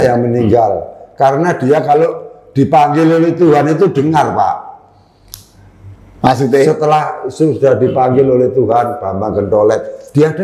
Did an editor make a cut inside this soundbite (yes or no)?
no